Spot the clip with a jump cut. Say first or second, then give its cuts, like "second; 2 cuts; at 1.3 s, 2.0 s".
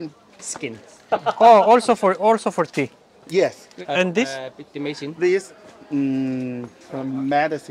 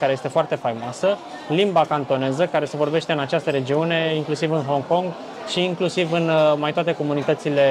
first; 1 cut; at 3.7 s